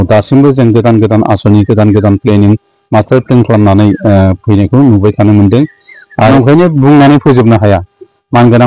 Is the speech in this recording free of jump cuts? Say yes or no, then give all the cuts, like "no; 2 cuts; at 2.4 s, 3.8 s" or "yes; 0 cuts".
no; 1 cut; at 6.3 s